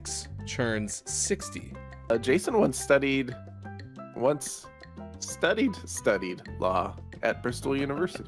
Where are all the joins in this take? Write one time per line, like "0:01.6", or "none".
0:02.1